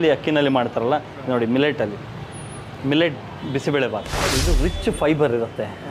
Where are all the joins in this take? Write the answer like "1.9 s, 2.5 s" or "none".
4.4 s